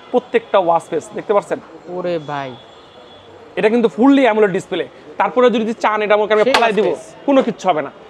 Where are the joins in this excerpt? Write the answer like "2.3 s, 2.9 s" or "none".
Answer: none